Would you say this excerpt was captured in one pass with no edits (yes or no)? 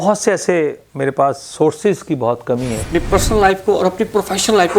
no